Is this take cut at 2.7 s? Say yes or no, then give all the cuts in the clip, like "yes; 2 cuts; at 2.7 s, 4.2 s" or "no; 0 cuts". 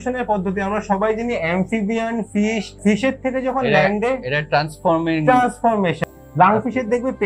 yes; 2 cuts; at 2.7 s, 6.0 s